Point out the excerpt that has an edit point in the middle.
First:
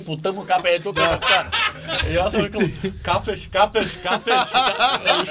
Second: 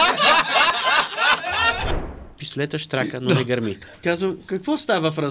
second; 2 cuts; at 1.9 s, 3.8 s

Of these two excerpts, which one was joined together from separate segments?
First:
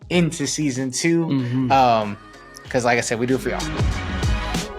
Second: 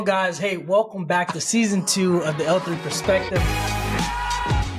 first; 1 cut; at 3.6 s

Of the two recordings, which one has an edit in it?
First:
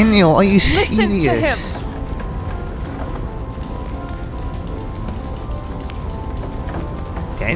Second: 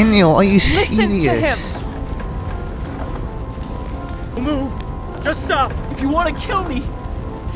second; 1 cut; at 4.4 s

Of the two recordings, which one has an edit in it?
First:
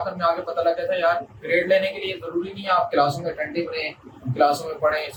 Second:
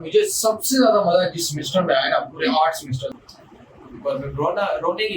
second; 1 cut; at 3.2 s

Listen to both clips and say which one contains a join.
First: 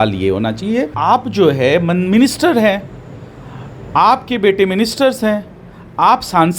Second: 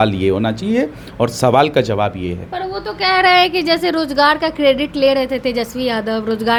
first; 1 cut; at 0.9 s

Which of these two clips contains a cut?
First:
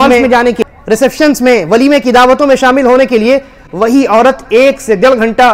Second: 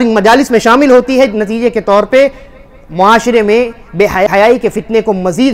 second; 1 cut; at 4.3 s

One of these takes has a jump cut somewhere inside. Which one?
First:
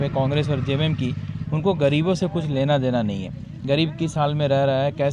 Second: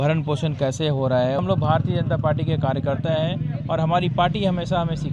second; 1 cut; at 1.4 s

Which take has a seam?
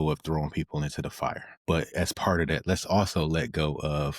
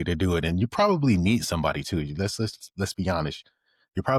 first; 1 cut; at 1.5 s

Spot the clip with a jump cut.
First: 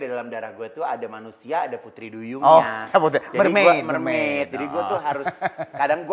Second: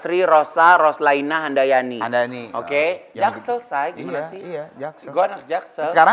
second; 1 cut; at 3.1 s

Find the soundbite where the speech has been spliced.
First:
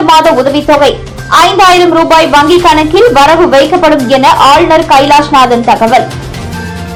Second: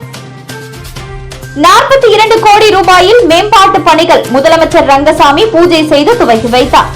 second; 1 cut; at 1.0 s

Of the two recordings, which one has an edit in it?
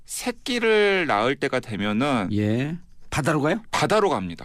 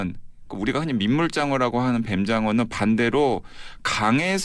first; 1 cut; at 2.5 s

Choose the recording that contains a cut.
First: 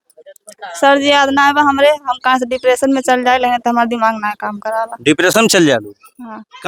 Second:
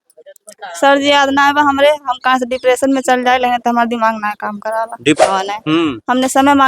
second; 1 cut; at 5.2 s

